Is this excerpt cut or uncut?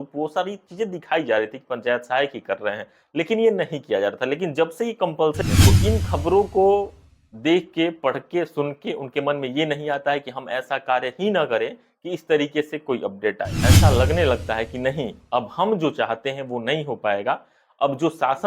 cut